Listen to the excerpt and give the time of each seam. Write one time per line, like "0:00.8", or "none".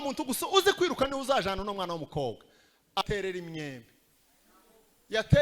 0:03.0